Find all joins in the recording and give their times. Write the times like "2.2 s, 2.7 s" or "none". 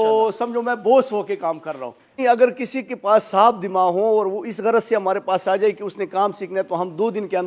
2.2 s